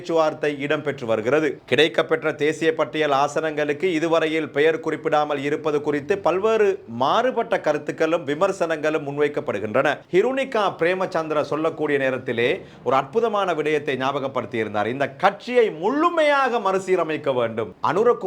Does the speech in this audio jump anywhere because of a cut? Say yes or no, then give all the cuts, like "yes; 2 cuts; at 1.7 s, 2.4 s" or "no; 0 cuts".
yes; 1 cut; at 10.0 s